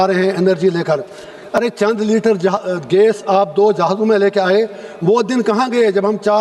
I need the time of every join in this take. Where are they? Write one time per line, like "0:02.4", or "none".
none